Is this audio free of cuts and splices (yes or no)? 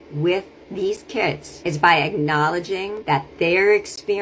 no